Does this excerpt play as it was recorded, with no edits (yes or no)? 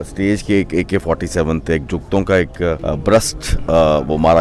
no